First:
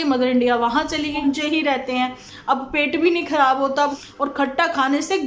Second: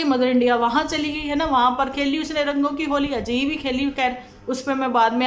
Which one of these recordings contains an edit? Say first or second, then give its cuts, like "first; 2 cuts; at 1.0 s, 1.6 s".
first; 2 cuts; at 1.2 s, 4.0 s